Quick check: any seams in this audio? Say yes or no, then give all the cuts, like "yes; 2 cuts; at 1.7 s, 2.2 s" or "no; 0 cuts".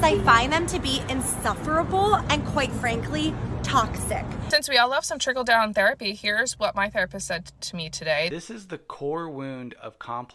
yes; 2 cuts; at 4.3 s, 8.3 s